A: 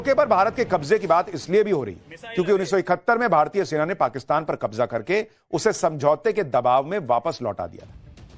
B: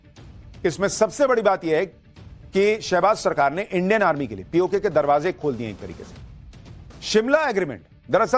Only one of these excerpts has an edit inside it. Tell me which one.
A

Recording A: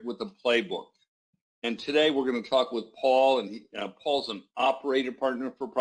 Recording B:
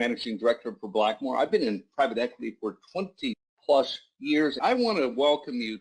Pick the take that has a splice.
B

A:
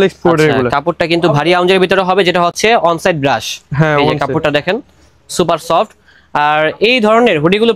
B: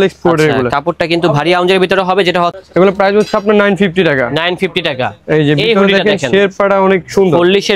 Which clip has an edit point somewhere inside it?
B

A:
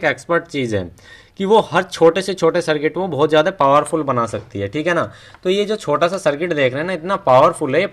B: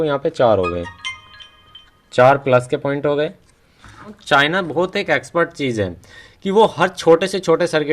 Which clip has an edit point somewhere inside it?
B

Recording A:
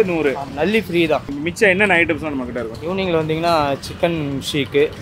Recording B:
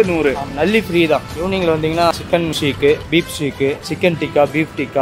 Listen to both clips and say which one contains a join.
B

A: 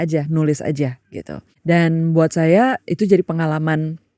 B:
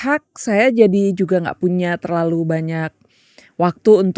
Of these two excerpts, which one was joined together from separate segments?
A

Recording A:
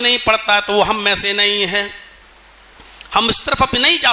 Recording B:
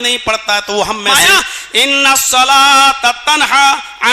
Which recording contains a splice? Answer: B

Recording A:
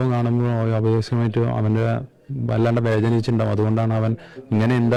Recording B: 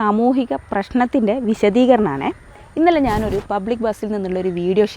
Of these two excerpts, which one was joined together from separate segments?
B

